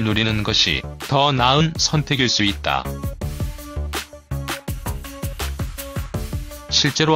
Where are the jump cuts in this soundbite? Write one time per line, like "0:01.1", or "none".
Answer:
0:04.5